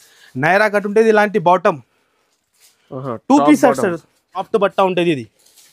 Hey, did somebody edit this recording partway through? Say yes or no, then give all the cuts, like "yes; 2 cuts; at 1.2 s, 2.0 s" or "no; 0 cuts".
yes; 1 cut; at 4.5 s